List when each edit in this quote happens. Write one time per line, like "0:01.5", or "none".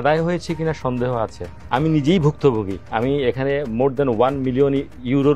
0:01.5